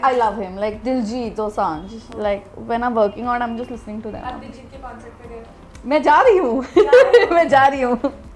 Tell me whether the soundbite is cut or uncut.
uncut